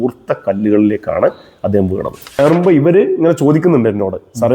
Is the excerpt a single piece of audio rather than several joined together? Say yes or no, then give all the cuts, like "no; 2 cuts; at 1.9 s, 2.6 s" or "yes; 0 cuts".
no; 1 cut; at 2.4 s